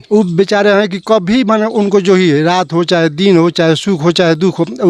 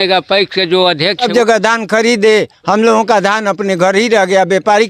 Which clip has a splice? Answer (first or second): second